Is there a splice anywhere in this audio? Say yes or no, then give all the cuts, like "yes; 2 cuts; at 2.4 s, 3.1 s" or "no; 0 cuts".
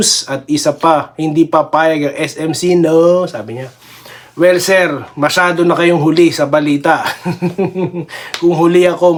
no; 0 cuts